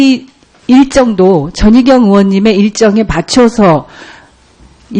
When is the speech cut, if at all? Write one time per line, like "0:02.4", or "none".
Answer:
0:01.0